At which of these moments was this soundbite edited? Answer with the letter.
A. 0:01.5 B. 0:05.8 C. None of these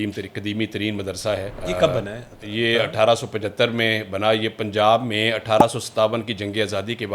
A